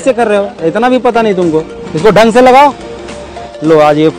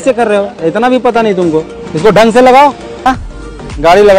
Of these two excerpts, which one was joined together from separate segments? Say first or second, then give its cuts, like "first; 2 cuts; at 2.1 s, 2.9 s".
second; 1 cut; at 3.1 s